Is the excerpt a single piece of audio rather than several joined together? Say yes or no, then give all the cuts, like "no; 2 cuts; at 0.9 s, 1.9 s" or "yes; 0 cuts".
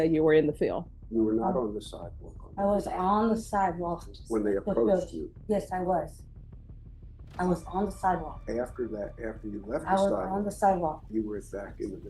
no; 1 cut; at 0.9 s